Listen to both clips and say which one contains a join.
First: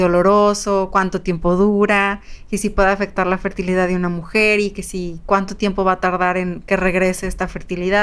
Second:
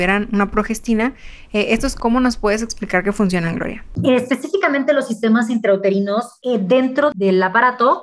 second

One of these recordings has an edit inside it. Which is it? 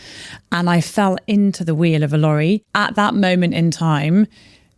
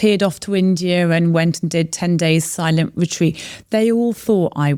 first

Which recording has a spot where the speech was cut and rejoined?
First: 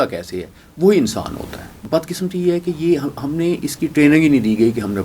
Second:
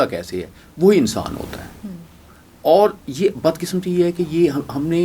first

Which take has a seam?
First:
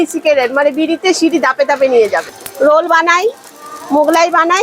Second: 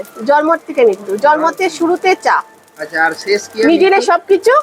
first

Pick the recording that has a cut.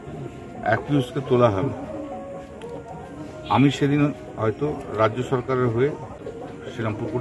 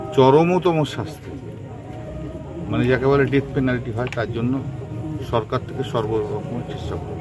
first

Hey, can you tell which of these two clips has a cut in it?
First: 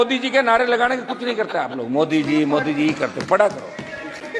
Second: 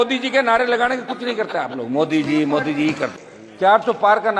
second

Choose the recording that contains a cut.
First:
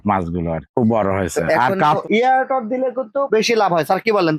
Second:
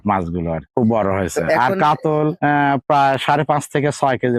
first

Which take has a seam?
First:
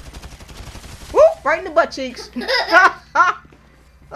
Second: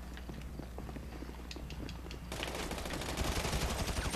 first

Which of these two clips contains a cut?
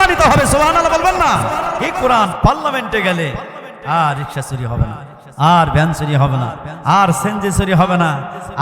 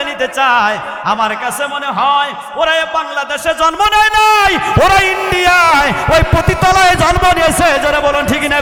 first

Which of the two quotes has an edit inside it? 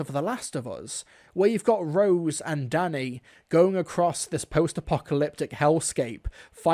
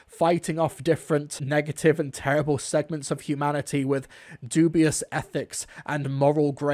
second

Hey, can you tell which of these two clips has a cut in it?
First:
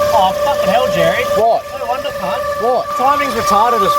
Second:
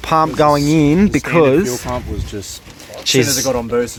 first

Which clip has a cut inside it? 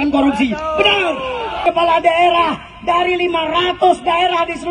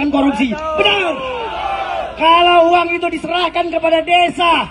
first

